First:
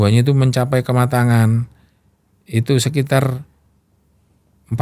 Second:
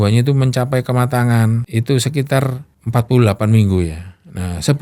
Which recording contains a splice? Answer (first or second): second